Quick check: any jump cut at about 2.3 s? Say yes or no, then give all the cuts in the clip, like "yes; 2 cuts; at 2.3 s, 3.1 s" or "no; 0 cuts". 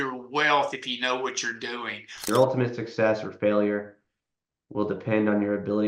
yes; 1 cut; at 2.3 s